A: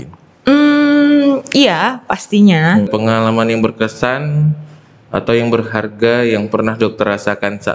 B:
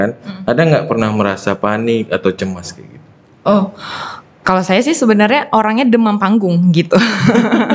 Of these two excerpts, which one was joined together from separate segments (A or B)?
A